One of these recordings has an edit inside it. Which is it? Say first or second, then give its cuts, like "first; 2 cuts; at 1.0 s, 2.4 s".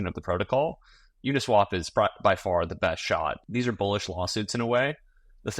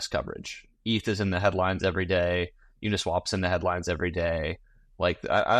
first; 1 cut; at 3.4 s